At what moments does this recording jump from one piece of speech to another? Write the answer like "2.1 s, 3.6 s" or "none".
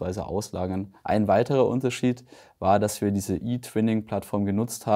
0.9 s